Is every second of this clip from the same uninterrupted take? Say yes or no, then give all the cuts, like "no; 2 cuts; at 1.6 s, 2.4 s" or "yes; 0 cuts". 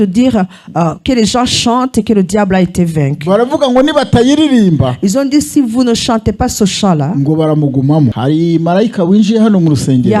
no; 1 cut; at 8.2 s